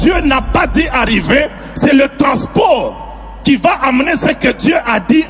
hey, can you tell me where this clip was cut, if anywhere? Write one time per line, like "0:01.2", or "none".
none